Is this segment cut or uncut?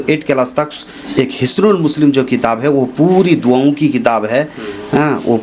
uncut